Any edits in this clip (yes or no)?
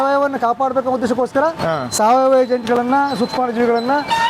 no